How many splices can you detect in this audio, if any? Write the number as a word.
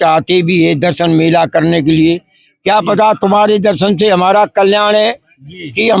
zero